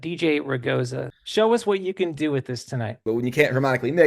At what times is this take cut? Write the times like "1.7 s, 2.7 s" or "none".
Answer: 1.1 s, 3.0 s

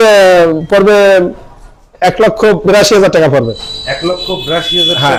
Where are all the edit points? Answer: none

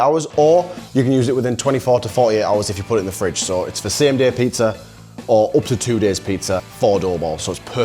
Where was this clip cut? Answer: 6.7 s

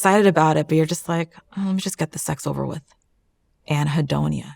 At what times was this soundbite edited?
none

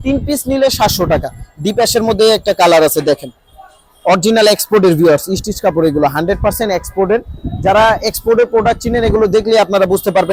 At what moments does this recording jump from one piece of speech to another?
none

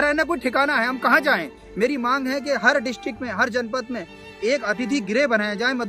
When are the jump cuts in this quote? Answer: 1.6 s, 4.2 s

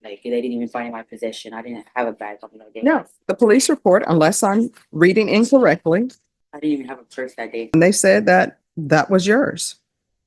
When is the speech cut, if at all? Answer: 7.7 s

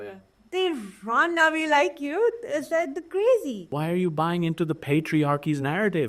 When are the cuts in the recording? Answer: 3.7 s

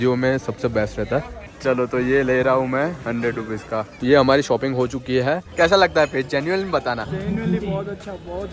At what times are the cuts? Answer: 1.4 s, 4.0 s, 5.5 s

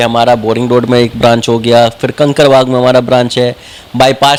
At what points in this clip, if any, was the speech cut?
none

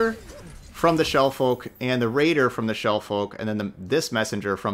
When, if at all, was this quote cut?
none

